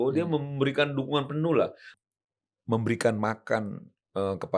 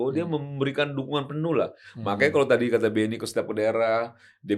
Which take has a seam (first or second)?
first